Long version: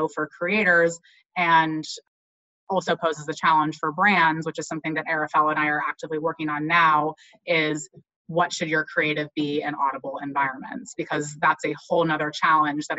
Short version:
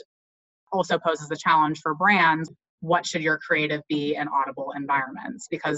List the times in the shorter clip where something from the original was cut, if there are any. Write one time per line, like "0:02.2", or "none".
0:02.5